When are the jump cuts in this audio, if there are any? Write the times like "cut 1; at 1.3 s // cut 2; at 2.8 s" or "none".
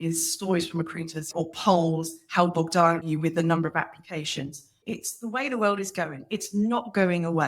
cut 1; at 1.3 s // cut 2; at 3.1 s // cut 3; at 4.8 s